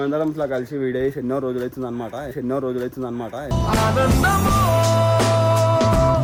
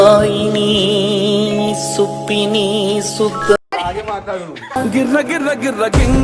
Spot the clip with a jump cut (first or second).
second